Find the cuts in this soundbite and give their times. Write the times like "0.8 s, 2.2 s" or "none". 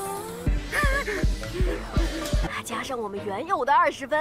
2.4 s